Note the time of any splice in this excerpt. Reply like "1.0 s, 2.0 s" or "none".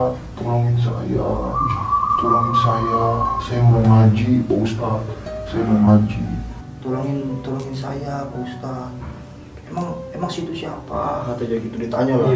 none